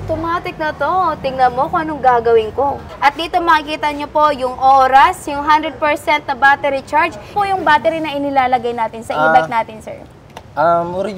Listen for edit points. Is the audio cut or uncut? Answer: cut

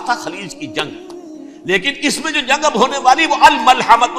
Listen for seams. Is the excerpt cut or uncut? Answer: cut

